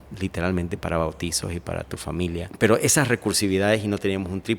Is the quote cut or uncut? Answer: cut